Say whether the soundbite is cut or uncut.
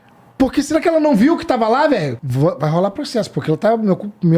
cut